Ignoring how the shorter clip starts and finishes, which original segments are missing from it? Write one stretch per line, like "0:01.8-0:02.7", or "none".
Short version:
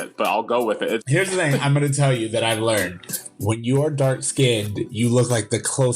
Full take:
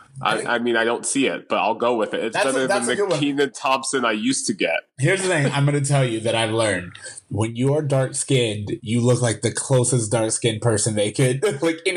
0:02.3-0:04.9